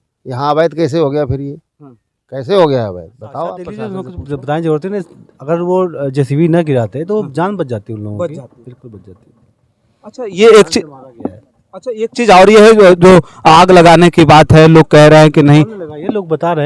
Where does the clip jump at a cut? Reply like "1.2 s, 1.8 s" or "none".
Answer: 3.9 s